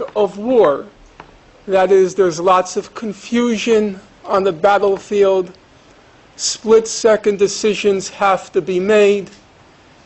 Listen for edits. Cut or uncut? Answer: cut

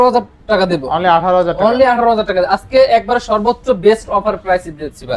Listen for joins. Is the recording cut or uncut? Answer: uncut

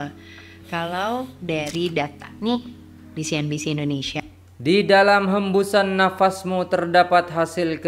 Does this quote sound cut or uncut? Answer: uncut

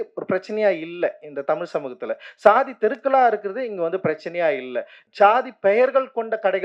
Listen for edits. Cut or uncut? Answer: cut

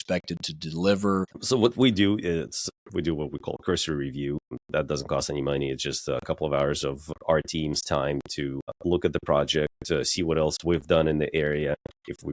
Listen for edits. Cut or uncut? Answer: cut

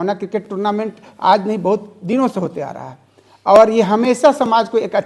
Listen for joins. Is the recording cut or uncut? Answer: uncut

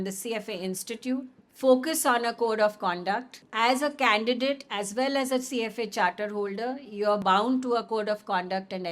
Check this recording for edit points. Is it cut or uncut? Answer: cut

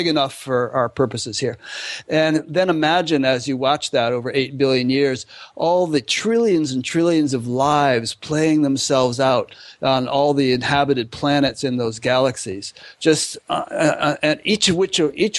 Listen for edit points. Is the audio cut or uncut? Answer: uncut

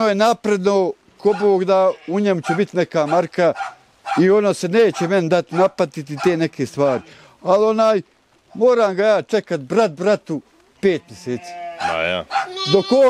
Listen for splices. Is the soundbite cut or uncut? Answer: uncut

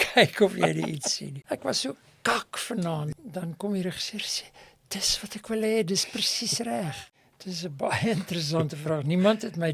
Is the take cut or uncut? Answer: cut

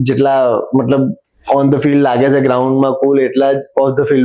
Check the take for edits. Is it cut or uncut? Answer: uncut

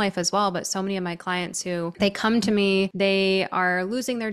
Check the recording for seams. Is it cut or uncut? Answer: cut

